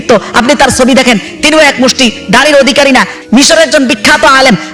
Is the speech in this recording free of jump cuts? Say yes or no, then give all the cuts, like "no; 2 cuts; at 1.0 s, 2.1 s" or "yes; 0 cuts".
no; 1 cut; at 3.2 s